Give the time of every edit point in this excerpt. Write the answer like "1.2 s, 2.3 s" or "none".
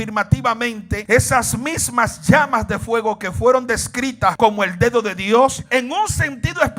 0.9 s, 4.3 s, 5.6 s

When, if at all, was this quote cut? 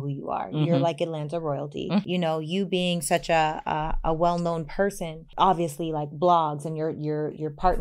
2.0 s, 5.2 s

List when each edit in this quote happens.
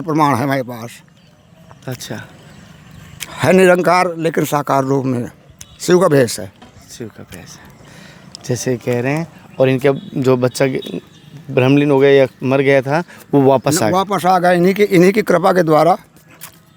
none

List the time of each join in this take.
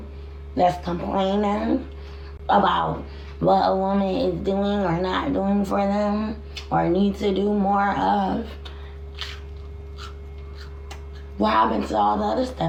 none

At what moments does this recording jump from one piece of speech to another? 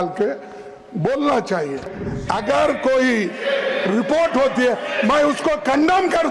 2.0 s

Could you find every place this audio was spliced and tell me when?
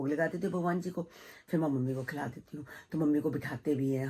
none

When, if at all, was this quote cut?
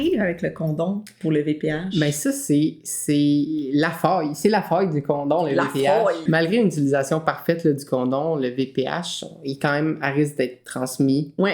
6.2 s

